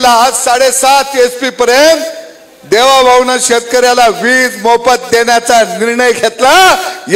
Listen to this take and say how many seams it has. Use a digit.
0